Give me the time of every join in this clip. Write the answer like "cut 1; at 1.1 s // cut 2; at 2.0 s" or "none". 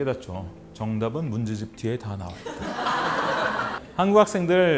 cut 1; at 3.8 s